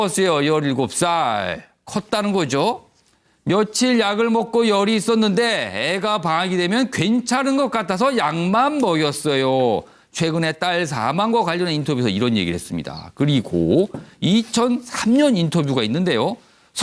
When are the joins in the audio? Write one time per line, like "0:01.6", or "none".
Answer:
0:09.9